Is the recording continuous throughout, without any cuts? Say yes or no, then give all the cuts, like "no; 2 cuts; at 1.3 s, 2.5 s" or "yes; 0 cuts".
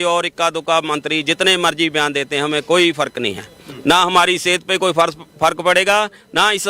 yes; 0 cuts